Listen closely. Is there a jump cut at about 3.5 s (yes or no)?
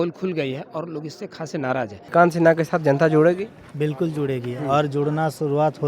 no